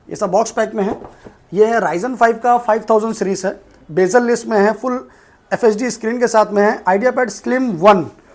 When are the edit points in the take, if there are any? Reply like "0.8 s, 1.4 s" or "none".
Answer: none